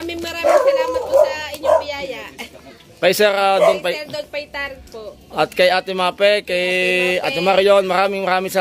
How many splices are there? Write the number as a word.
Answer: zero